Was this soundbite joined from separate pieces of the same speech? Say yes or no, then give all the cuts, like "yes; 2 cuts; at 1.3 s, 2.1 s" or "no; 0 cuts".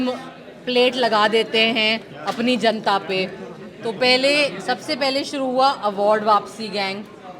no; 0 cuts